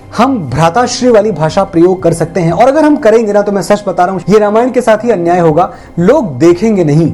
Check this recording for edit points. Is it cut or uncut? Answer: cut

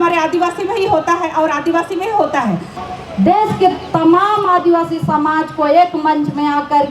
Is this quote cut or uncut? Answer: cut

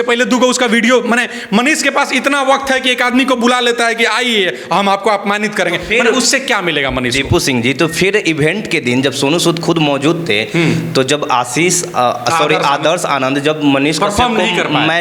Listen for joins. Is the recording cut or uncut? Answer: uncut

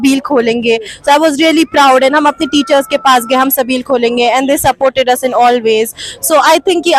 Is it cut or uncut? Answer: uncut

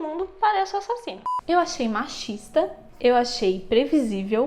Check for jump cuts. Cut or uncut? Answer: cut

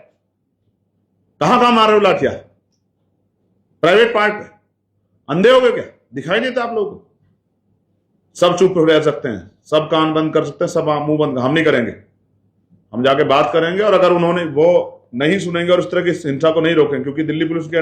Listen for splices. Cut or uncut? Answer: uncut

